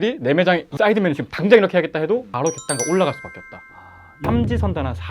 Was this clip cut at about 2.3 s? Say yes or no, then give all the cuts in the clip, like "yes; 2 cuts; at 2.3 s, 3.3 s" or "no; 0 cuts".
yes; 2 cuts; at 2.3 s, 4.1 s